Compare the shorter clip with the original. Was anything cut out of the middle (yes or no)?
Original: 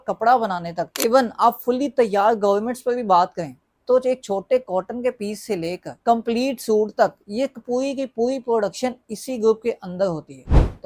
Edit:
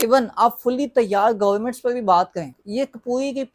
yes